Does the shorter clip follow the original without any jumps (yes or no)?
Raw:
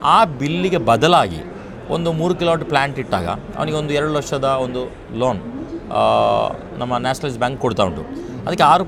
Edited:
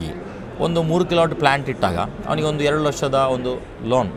yes